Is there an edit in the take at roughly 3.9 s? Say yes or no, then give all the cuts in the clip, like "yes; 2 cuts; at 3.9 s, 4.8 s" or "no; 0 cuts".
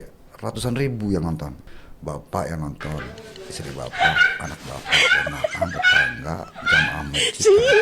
yes; 1 cut; at 3.9 s